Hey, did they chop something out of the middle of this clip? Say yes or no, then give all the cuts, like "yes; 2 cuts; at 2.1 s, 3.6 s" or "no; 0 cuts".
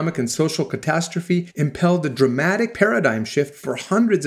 yes; 2 cuts; at 1.5 s, 2.7 s